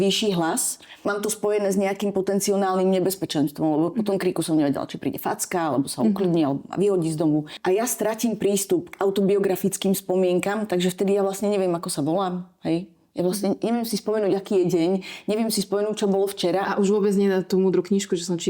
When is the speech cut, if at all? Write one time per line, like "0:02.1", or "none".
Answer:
0:00.9
0:07.5